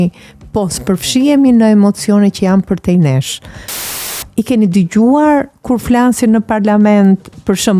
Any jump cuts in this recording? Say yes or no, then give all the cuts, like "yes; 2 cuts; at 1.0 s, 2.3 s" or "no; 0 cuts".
yes; 1 cut; at 3.9 s